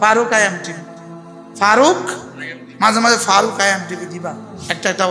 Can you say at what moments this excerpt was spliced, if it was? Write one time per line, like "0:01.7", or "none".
none

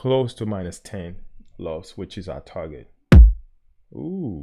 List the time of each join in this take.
none

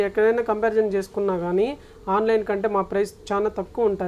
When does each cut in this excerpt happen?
none

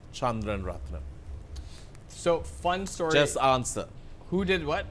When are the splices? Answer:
none

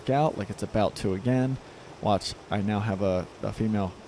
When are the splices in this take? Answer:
none

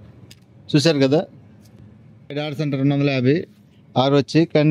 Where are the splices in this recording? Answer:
0:02.4

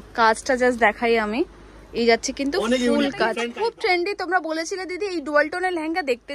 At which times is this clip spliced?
0:03.4

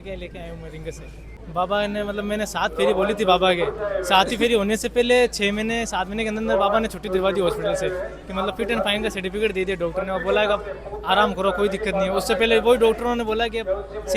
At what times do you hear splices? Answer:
0:01.4

